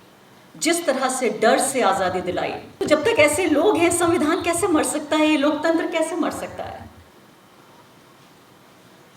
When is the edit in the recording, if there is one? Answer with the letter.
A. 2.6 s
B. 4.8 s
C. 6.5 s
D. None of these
A